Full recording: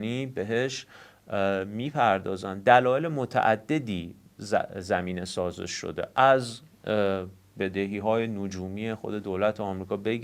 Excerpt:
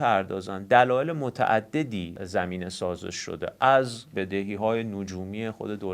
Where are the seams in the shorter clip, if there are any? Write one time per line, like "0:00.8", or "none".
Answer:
0:02.2
0:04.0